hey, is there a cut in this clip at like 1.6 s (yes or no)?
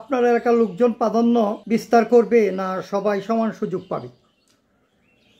yes